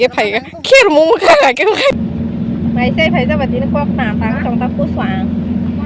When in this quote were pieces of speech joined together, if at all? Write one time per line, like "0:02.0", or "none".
0:01.9

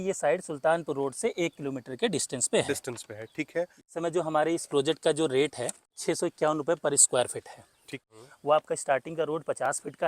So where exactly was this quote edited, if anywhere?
0:03.8
0:05.9
0:08.1

